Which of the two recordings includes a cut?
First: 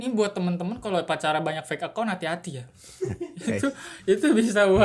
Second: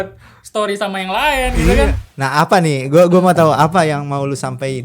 second; 1 cut; at 2.1 s

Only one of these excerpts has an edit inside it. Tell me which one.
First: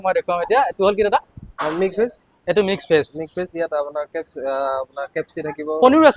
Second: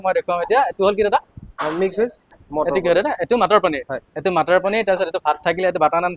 second; 1 cut; at 2.4 s

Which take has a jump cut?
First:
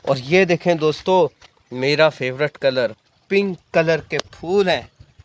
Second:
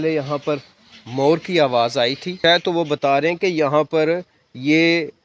second; 1 cut; at 2.4 s

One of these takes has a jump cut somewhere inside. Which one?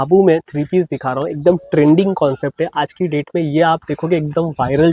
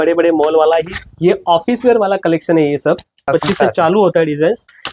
second; 1 cut; at 3.3 s

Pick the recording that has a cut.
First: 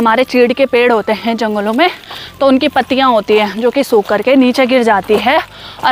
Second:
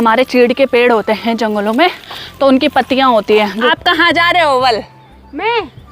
second; 1 cut; at 3.7 s

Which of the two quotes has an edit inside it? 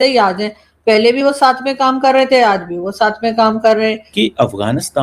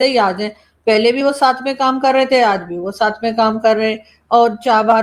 first; 1 cut; at 4.0 s

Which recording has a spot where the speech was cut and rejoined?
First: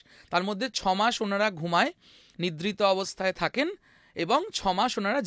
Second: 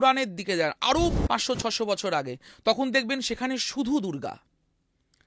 second; 1 cut; at 1.2 s

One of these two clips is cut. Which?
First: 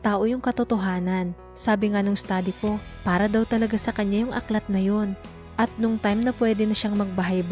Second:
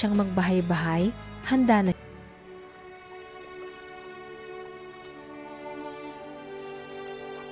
second; 1 cut; at 2.0 s

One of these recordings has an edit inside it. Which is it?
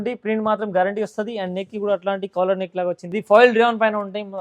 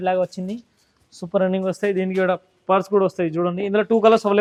first; 1 cut; at 3.1 s

